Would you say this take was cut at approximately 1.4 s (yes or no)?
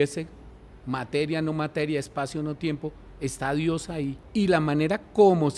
no